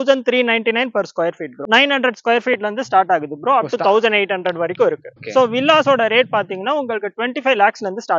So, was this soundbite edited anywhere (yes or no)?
yes